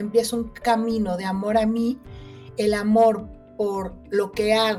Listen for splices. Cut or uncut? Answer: uncut